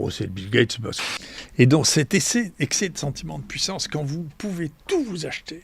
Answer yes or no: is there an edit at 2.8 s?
no